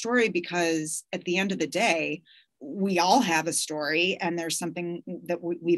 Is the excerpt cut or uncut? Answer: uncut